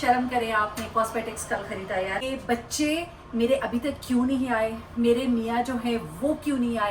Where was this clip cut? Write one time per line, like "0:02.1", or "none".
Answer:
0:02.2